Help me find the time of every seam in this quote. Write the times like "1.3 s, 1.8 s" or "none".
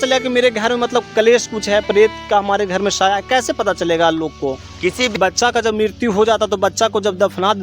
5.2 s